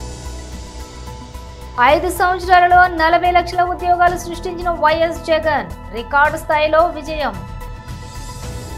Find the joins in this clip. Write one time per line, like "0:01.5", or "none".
0:00.9
0:01.7